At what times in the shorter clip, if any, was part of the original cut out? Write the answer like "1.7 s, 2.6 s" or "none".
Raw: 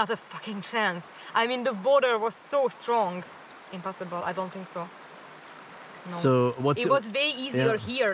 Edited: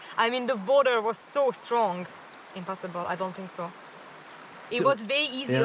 4.7 s